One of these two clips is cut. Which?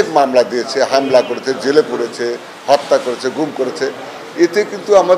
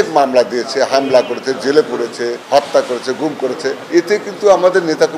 second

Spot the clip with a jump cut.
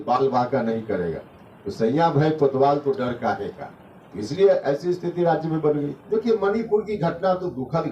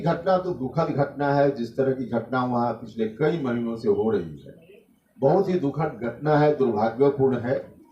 first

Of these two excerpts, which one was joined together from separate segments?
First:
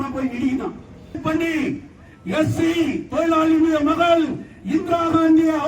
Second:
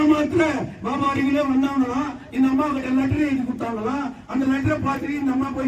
first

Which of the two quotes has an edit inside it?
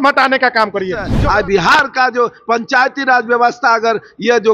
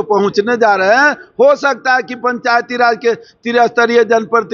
first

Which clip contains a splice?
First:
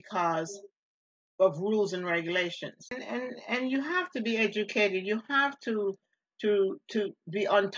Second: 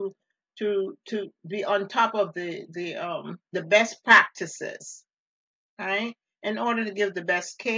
first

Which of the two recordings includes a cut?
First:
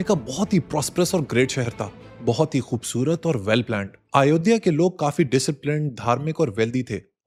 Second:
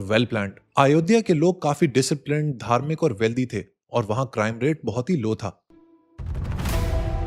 second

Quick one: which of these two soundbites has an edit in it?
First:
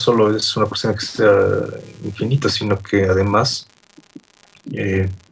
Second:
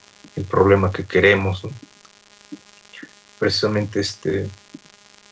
first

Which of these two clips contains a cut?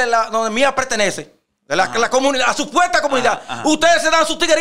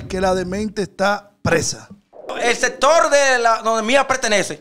second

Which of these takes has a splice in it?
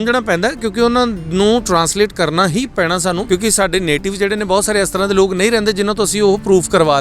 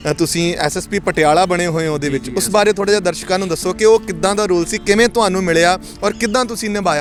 first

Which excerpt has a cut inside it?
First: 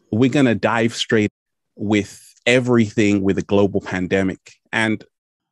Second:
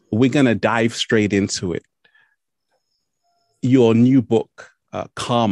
second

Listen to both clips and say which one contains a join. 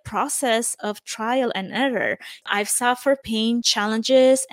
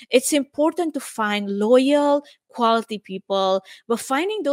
first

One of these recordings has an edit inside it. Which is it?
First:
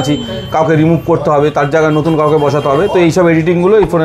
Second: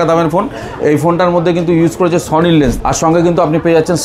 second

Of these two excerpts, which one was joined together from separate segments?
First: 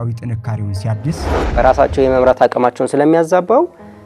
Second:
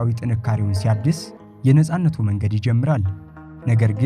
first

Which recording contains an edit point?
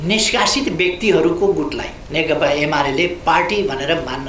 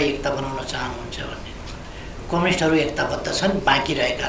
first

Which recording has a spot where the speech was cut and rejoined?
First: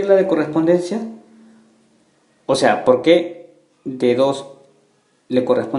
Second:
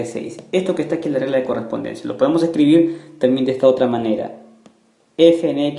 first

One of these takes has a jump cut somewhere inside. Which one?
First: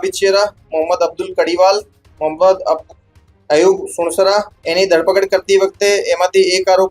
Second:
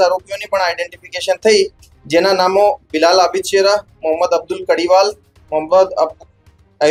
first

